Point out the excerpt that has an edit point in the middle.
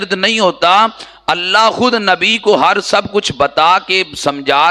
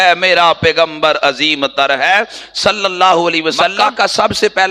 second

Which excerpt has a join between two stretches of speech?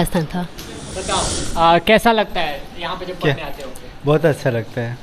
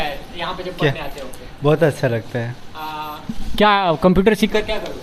first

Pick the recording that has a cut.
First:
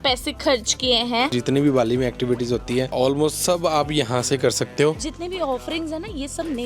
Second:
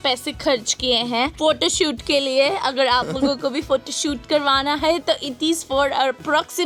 first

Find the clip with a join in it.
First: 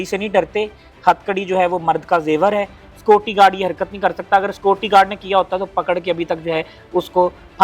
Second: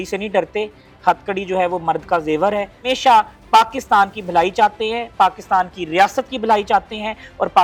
first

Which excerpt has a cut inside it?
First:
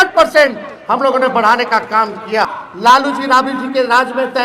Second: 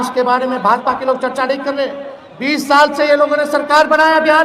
first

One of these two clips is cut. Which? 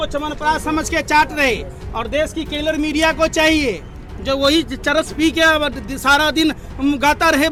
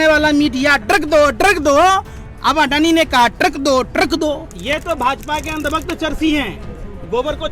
second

